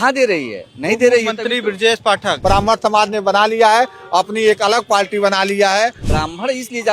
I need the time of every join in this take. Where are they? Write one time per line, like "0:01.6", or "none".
0:02.4
0:06.0